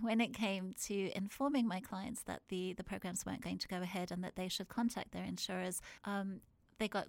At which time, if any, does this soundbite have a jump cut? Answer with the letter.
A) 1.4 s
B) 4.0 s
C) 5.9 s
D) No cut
C